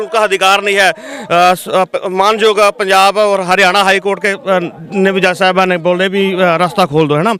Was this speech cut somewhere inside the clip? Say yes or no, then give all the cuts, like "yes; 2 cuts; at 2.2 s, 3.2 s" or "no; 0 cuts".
no; 0 cuts